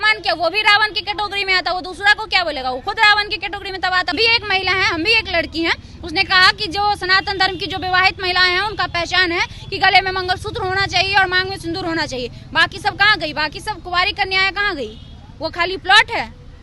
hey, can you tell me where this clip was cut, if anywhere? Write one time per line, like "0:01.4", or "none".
0:04.1